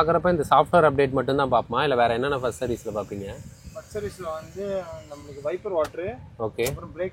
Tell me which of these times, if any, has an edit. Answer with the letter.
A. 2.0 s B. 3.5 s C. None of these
C